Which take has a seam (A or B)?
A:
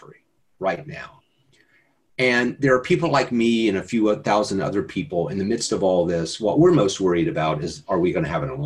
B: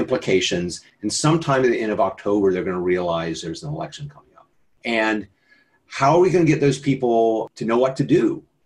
B